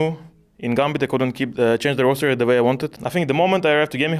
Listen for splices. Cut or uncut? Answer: cut